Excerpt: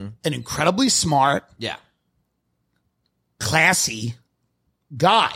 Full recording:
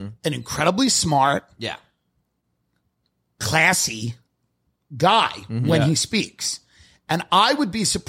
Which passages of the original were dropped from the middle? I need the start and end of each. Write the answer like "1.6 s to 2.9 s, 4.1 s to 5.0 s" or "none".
none